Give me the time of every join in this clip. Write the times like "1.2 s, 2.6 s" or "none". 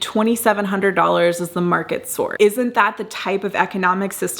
2.3 s